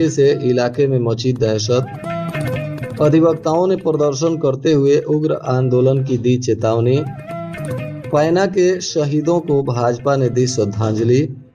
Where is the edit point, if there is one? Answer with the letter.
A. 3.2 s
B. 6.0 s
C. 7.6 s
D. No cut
D